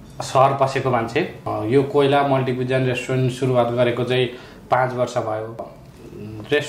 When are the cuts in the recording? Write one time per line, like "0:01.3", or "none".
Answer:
0:01.5
0:05.7